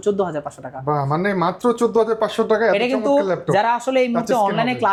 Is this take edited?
no; 0 cuts

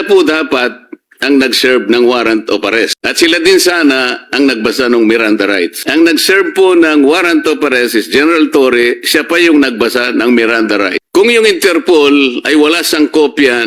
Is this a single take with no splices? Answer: no; 3 cuts; at 3.0 s, 5.8 s, 11.0 s

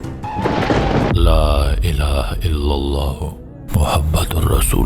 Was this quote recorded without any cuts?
no; 1 cut; at 1.1 s

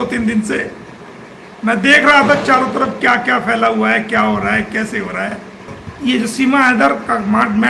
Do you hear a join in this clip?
yes; 1 cut; at 5.8 s

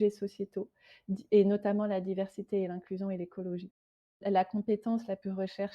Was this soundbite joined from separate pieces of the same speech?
yes; 1 cut; at 4.2 s

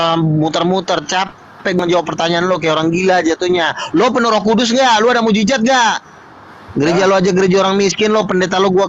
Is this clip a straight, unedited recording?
yes; 0 cuts

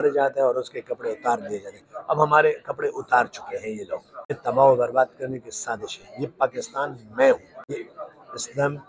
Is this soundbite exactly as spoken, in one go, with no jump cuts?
no; 2 cuts; at 4.4 s, 7.5 s

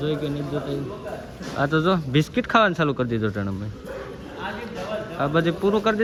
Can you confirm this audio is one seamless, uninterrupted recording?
yes; 0 cuts

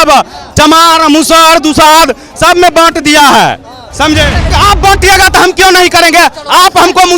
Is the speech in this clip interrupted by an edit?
yes; 1 cut; at 4.5 s

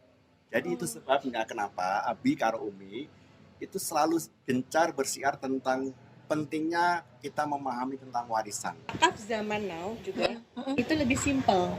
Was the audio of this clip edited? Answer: yes; 1 cut; at 8.9 s

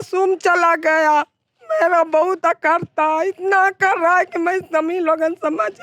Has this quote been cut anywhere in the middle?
no; 0 cuts

